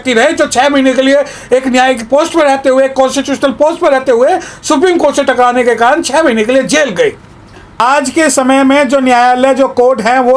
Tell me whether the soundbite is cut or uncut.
cut